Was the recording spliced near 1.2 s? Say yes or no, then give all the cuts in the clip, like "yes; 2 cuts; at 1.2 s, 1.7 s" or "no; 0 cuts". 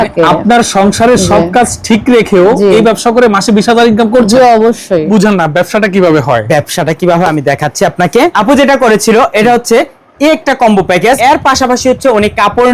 no; 3 cuts; at 5.1 s, 8.3 s, 11.2 s